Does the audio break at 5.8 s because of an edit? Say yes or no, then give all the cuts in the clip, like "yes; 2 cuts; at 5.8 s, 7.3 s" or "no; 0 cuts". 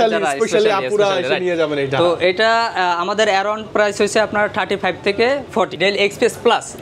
yes; 1 cut; at 5.8 s